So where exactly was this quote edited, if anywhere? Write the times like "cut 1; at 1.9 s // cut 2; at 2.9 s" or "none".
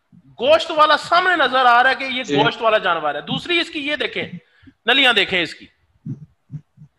none